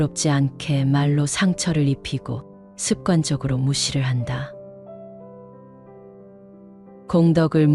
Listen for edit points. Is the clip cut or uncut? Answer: uncut